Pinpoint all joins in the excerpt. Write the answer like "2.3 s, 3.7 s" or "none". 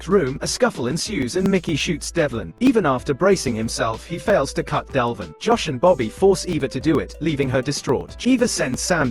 2.4 s, 8.1 s

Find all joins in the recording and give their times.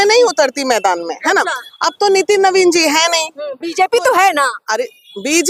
none

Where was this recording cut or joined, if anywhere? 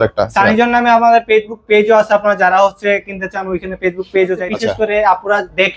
4.4 s

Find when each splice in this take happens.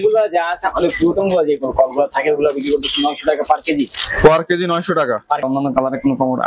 5.4 s

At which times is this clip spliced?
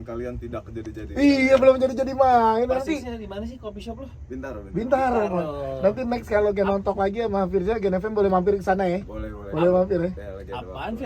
none

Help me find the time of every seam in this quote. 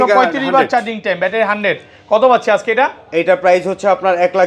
none

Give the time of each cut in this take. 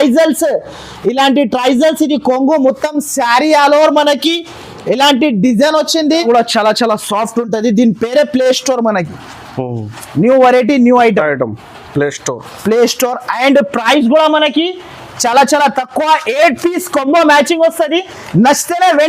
6.2 s

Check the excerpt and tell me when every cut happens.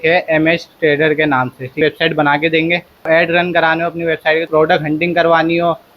1.8 s, 3.1 s, 4.5 s

